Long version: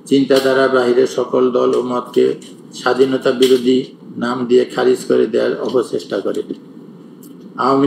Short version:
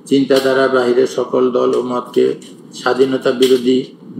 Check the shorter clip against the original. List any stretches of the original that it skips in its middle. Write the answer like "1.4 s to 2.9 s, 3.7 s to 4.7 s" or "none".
none